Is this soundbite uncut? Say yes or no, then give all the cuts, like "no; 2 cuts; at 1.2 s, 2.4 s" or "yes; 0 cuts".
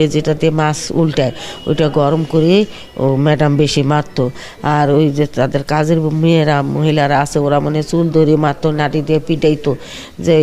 yes; 0 cuts